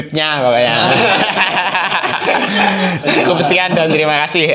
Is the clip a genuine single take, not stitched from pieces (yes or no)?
yes